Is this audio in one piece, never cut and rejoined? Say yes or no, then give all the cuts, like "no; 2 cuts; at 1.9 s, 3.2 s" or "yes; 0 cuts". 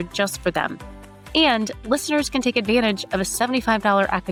yes; 0 cuts